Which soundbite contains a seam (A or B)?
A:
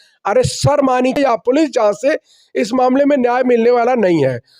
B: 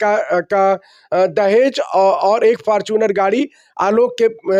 A